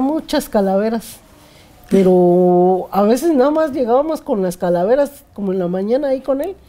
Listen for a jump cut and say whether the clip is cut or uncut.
uncut